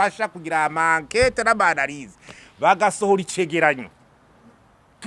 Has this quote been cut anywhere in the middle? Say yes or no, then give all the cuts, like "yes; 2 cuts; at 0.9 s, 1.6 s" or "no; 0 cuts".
no; 0 cuts